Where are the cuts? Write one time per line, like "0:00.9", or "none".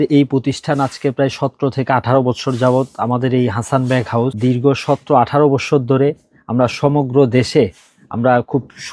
0:04.3